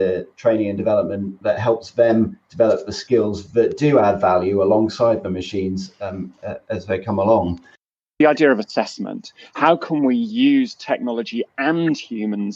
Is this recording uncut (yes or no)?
no